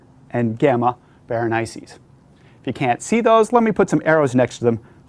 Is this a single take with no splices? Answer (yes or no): yes